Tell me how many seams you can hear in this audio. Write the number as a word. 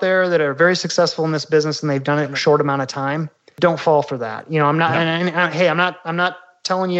zero